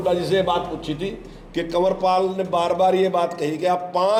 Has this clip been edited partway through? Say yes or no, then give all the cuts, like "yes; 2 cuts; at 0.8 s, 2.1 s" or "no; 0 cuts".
no; 0 cuts